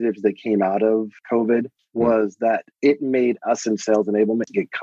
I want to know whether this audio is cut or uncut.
uncut